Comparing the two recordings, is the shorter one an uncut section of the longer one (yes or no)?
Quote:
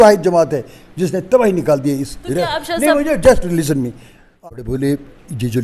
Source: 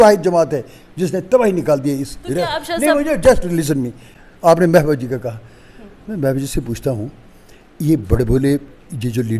no